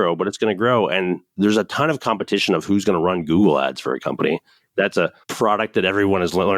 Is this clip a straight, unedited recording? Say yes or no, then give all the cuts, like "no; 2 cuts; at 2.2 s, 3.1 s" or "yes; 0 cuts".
no; 2 cuts; at 1.3 s, 5.1 s